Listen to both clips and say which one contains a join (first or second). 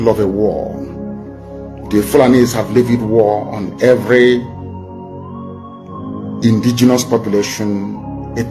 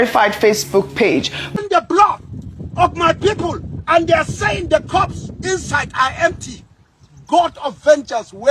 second